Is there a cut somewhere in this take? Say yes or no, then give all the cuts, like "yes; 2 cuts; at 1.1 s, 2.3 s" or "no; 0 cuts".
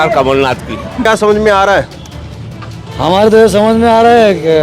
yes; 1 cut; at 1.0 s